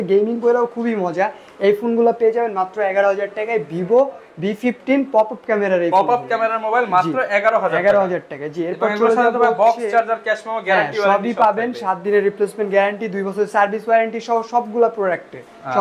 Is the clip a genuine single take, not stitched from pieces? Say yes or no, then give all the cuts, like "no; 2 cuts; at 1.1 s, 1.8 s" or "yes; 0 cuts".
yes; 0 cuts